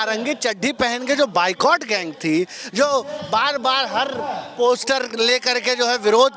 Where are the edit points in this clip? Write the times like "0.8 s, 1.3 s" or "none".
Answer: none